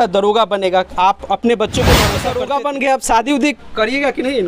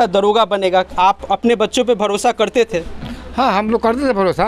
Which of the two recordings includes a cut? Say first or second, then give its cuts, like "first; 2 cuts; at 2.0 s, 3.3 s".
first; 1 cut; at 2.2 s